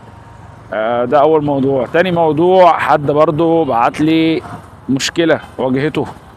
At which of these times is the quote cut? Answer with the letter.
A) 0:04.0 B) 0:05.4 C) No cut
C